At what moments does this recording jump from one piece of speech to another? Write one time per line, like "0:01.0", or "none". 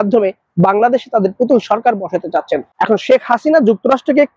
0:02.6